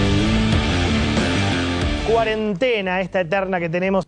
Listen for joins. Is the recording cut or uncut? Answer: uncut